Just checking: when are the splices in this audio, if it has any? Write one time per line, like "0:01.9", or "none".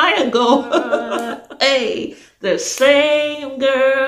0:01.3